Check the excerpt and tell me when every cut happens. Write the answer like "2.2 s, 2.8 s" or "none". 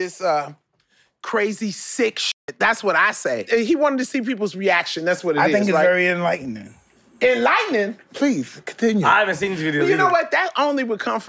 3.4 s